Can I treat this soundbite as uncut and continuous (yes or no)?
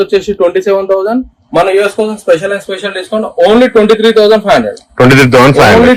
yes